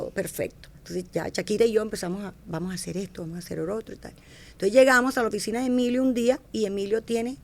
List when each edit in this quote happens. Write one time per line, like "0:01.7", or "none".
none